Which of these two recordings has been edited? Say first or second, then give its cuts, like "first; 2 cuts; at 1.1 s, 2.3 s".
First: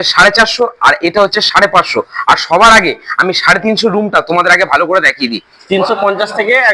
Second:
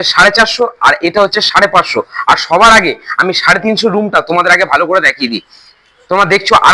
first; 1 cut; at 5.5 s